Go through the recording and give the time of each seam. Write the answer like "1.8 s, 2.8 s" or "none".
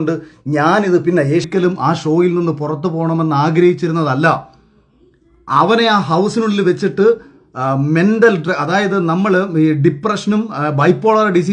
1.5 s